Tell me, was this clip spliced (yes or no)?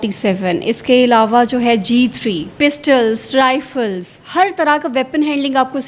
no